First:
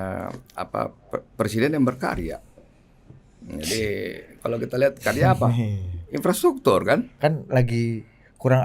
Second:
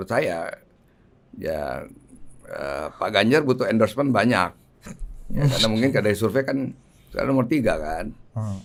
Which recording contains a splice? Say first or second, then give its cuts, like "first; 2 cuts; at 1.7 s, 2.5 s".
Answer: first; 1 cut; at 7.1 s